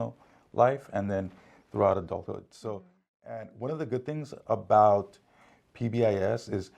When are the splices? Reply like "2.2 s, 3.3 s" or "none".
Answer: 2.5 s